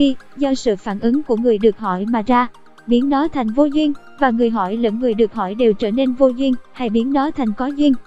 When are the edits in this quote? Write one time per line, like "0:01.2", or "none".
none

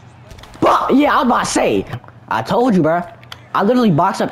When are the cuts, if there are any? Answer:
0:01.9

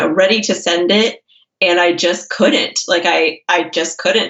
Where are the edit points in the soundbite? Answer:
none

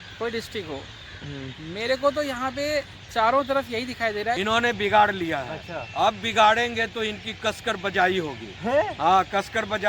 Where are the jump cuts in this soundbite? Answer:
0:04.4

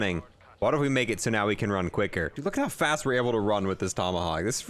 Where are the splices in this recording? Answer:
0:02.4

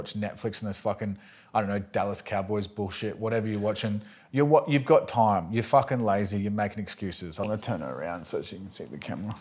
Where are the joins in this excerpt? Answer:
0:07.5

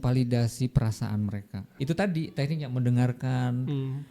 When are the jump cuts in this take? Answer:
0:01.7

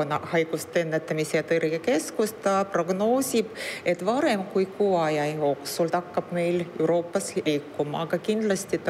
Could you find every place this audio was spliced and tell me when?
0:05.9
0:07.4

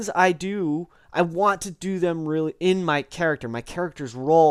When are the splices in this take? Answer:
none

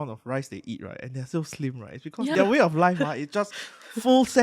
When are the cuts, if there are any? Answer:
0:02.3

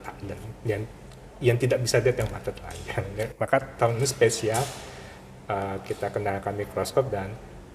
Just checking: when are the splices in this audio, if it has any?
none

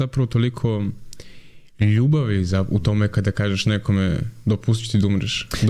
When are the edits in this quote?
none

